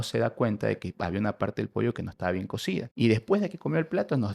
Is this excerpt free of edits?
no; 1 cut; at 2.9 s

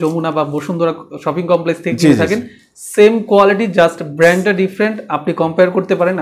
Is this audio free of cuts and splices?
yes; 0 cuts

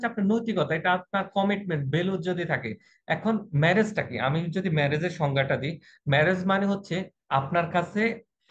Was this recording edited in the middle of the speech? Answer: no; 0 cuts

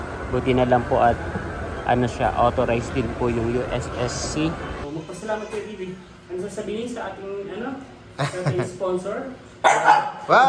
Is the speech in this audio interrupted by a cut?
yes; 1 cut; at 4.8 s

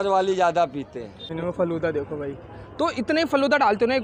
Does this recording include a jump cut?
yes; 1 cut; at 1.3 s

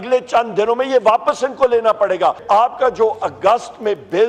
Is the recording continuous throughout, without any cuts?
no; 1 cut; at 2.4 s

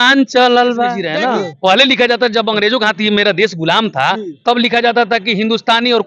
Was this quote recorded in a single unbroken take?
no; 1 cut; at 1.0 s

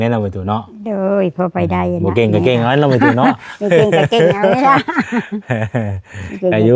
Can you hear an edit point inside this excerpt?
no; 0 cuts

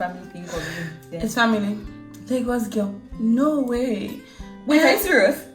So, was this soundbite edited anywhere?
yes; 1 cut; at 1.0 s

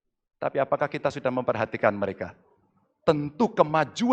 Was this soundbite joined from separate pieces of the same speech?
no; 0 cuts

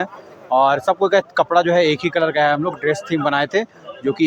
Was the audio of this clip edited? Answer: no; 0 cuts

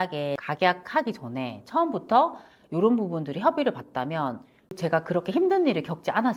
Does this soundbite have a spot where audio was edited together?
no; 0 cuts

